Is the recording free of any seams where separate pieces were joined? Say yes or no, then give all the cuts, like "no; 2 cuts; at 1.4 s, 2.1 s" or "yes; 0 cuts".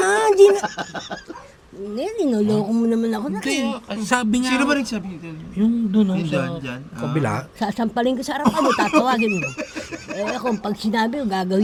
yes; 0 cuts